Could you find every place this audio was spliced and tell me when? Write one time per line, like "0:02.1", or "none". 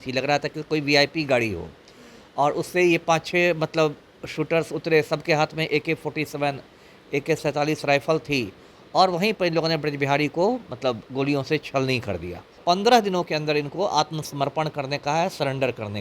0:12.6